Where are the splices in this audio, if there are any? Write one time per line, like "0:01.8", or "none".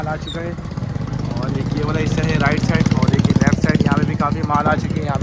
none